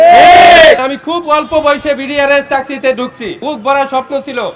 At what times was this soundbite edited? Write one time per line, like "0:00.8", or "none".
0:00.8
0:03.4